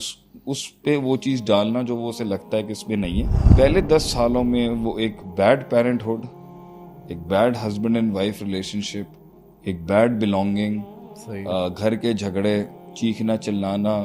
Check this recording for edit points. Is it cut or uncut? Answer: cut